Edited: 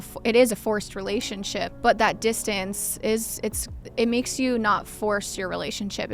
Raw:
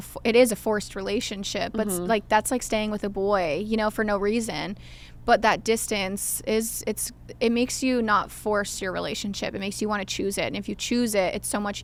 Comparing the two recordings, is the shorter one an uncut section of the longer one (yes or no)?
no